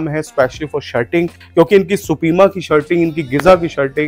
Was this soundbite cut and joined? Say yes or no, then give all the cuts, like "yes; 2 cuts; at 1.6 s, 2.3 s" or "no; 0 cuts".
no; 0 cuts